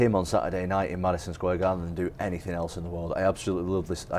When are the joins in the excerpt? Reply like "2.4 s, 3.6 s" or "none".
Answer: none